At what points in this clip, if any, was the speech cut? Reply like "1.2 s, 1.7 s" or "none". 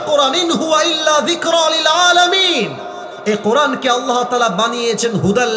none